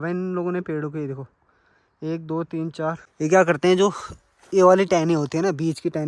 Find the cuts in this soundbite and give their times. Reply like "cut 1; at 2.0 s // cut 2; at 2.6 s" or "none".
cut 1; at 3.0 s

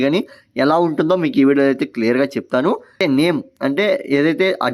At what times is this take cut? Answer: cut 1; at 3.0 s

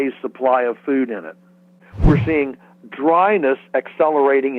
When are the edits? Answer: cut 1; at 1.9 s

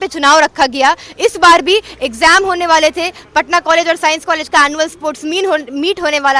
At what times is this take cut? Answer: none

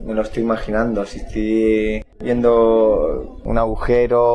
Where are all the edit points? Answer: cut 1; at 2.1 s // cut 2; at 3.3 s

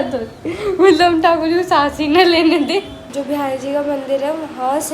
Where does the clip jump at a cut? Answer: cut 1; at 3.0 s

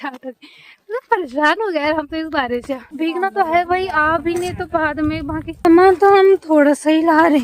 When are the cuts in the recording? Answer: cut 1; at 2.9 s // cut 2; at 5.6 s

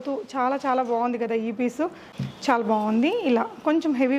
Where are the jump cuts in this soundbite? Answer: cut 1; at 2.1 s

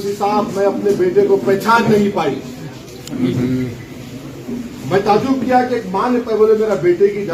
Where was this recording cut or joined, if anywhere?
none

